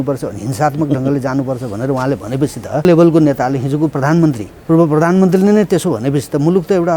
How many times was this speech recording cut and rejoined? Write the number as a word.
two